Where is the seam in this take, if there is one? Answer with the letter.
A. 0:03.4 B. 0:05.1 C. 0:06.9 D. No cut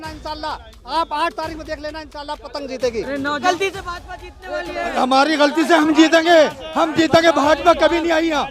A